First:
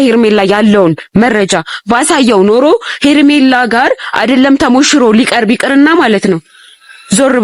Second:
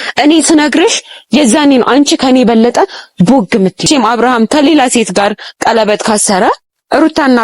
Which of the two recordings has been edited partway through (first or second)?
second